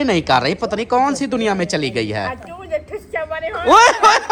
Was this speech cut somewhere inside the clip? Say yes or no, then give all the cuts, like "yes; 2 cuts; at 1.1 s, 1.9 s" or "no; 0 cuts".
no; 0 cuts